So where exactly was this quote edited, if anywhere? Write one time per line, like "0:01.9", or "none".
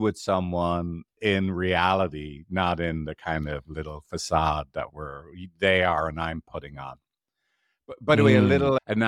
none